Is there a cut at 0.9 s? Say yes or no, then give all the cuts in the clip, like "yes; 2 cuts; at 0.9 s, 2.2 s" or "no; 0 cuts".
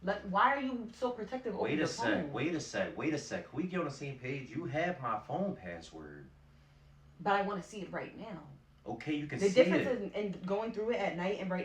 yes; 1 cut; at 0.9 s